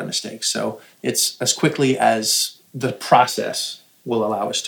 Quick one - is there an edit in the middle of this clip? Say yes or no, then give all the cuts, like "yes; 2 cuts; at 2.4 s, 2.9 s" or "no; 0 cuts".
no; 0 cuts